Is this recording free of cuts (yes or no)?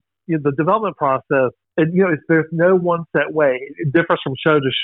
no